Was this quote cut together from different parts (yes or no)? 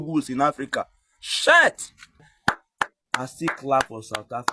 yes